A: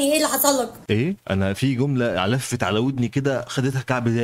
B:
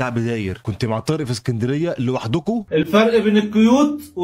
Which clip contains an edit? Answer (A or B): B